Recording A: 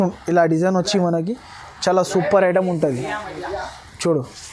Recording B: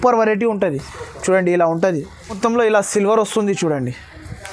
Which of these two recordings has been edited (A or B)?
B